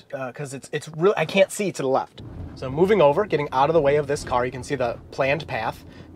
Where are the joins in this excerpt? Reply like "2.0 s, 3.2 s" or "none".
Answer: 2.2 s